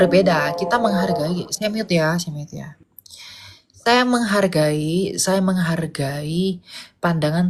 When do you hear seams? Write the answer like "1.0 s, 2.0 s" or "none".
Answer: none